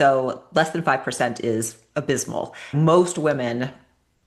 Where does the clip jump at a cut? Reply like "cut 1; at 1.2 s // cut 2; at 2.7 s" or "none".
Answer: none

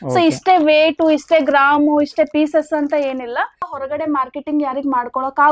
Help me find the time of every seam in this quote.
cut 1; at 3.7 s

